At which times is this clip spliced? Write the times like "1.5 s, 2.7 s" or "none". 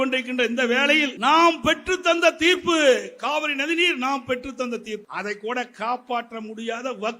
1.1 s, 5.1 s